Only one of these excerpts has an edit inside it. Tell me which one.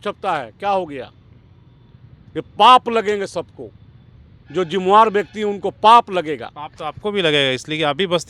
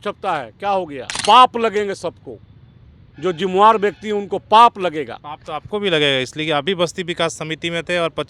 second; 1 cut; at 1.2 s

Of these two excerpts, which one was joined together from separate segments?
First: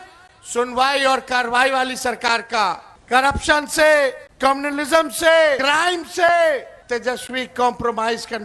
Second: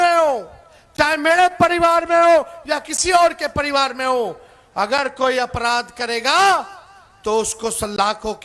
first; 4 cuts; at 2.9 s, 4.3 s, 5.6 s, 6.7 s

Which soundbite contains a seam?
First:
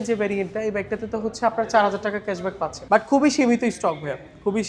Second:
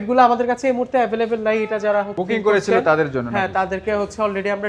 first; 1 cut; at 2.7 s

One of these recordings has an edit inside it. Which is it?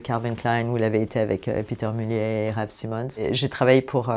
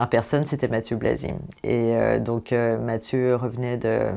first; 1 cut; at 3.2 s

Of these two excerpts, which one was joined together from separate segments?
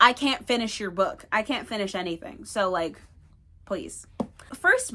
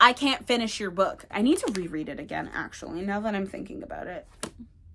second; 1 cut; at 1.2 s

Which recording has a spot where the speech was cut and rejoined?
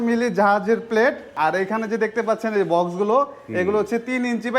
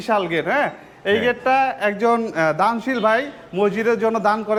first; 1 cut; at 1.3 s

